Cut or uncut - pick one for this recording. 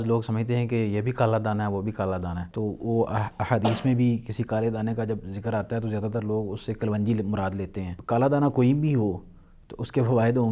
cut